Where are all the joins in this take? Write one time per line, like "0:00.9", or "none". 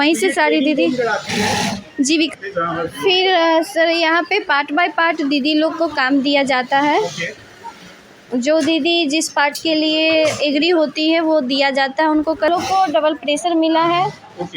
0:02.3
0:12.5